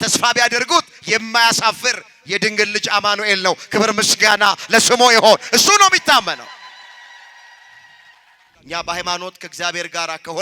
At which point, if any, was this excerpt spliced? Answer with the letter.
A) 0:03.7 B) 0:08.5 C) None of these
B